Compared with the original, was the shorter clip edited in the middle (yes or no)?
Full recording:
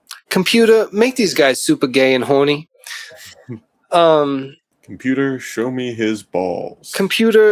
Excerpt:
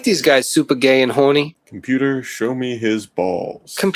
yes